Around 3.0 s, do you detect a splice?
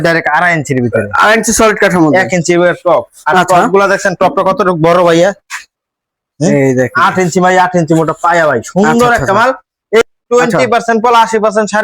no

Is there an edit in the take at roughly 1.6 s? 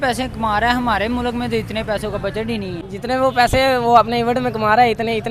no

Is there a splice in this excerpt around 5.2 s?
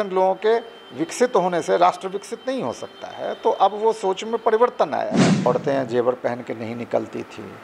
yes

